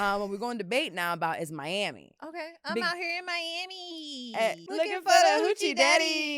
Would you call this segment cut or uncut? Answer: cut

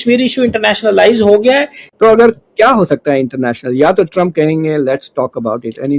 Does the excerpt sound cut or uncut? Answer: cut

